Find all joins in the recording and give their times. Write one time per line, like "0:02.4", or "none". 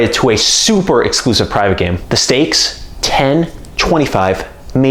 0:02.0